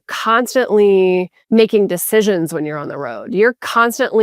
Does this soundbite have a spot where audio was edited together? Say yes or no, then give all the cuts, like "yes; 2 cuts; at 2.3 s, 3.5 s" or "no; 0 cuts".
yes; 1 cut; at 1.4 s